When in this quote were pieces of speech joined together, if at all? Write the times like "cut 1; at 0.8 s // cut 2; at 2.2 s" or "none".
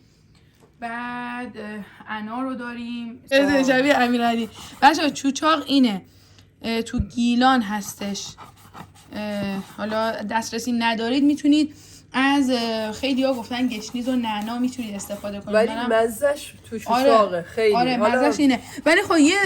cut 1; at 3.3 s